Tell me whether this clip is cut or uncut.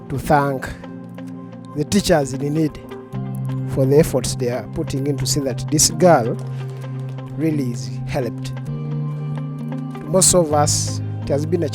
uncut